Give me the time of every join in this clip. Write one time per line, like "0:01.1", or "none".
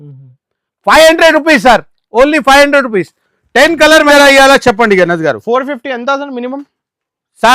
0:04.1